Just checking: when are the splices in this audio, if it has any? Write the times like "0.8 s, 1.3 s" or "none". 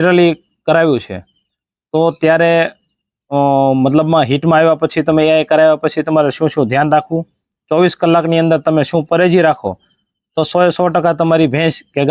none

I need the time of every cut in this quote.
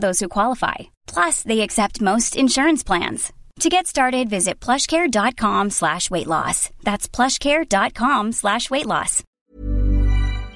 9.2 s

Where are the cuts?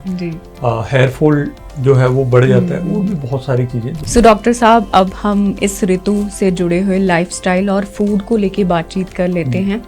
4.0 s

